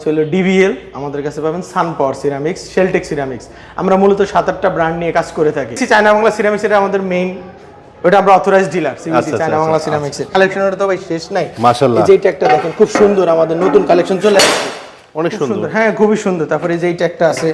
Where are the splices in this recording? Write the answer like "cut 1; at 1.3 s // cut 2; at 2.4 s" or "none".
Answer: cut 1; at 5.8 s // cut 2; at 10.3 s